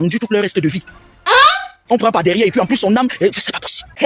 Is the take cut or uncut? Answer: uncut